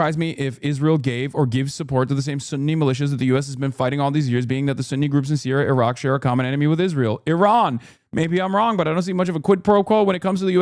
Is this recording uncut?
yes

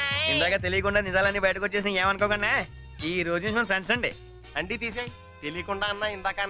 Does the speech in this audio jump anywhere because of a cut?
no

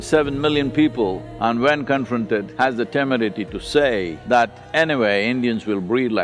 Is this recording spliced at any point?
yes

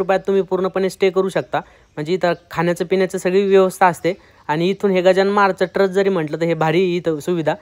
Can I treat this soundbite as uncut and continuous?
yes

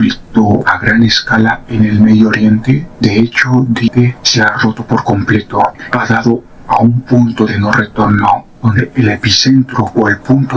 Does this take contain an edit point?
yes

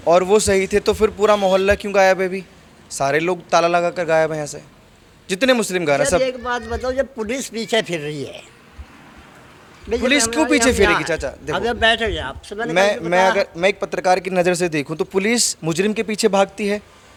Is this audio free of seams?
yes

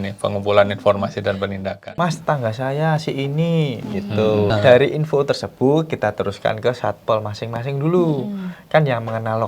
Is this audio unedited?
no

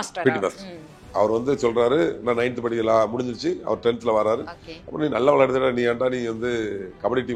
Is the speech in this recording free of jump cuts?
yes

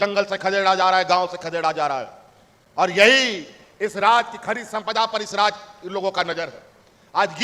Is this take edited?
no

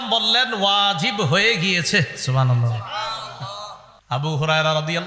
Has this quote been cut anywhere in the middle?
yes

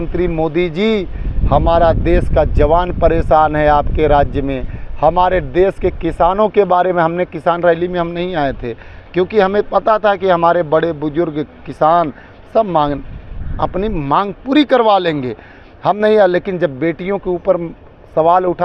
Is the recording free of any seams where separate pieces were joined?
yes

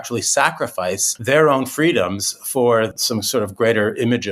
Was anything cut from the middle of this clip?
yes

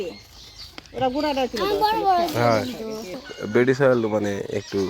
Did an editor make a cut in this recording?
yes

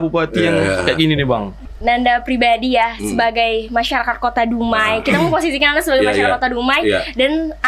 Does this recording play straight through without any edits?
no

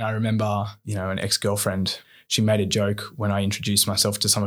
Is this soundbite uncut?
no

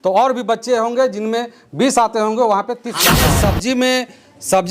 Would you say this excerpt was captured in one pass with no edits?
no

